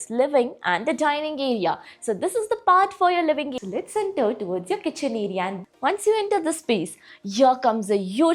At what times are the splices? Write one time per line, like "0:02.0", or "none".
0:03.5
0:05.6